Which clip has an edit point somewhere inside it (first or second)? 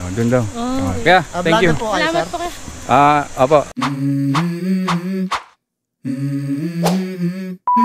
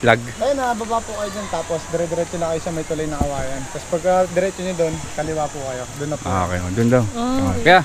first